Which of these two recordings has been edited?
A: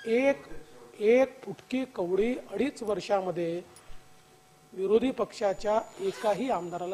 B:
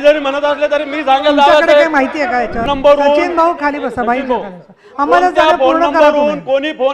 B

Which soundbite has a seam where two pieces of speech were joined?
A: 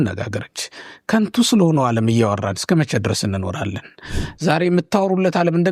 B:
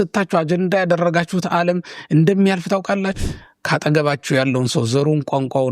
B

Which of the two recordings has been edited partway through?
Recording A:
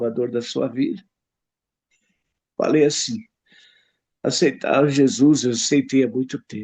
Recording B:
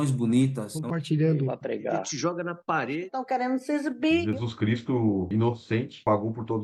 A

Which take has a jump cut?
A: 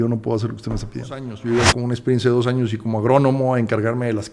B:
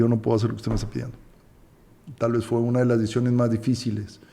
A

